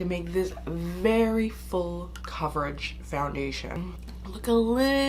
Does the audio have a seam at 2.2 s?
yes; 2 cuts; at 2.2 s, 3.9 s

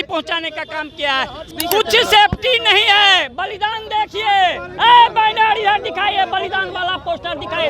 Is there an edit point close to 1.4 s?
yes; 1 cut; at 1.4 s

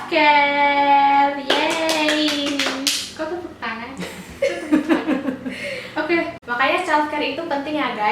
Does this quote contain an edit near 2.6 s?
no; 1 cut; at 6.4 s

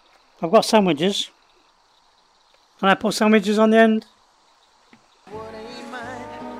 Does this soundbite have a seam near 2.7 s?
no; 1 cut; at 5.2 s

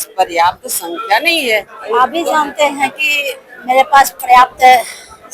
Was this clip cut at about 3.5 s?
no; 1 cut; at 1.8 s

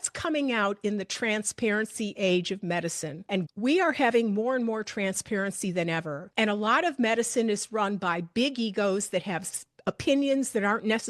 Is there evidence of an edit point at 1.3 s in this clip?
no; 2 cuts; at 3.1 s, 6.2 s

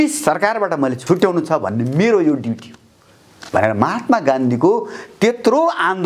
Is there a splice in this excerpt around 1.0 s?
yes; 1 cut; at 1.0 s

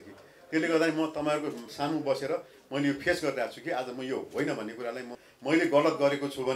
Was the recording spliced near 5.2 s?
yes; 1 cut; at 5.2 s

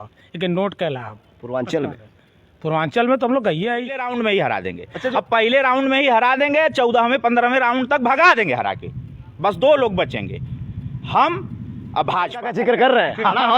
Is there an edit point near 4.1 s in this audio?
yes; 2 cuts; at 4.1 s, 12.5 s

